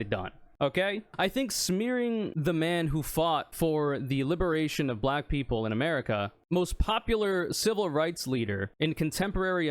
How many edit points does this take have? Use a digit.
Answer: 2